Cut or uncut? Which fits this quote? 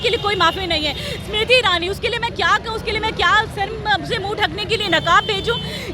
uncut